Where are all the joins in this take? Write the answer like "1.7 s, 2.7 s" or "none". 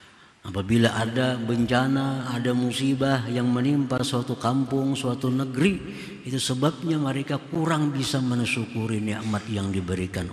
none